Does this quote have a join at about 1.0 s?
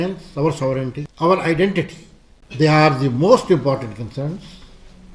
yes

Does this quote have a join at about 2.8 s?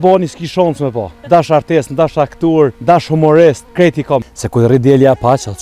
yes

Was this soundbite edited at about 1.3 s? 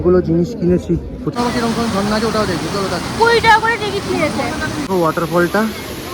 yes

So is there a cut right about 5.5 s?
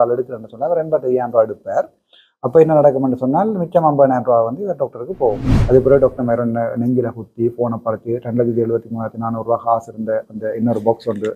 yes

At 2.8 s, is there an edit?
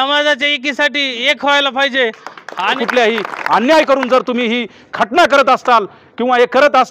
yes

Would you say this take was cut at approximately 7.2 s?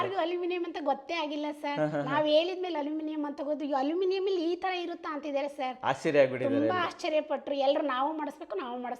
no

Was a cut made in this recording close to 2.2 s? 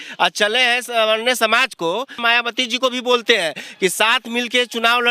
yes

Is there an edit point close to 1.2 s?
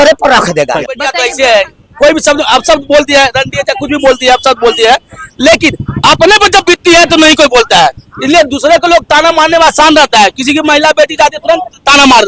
yes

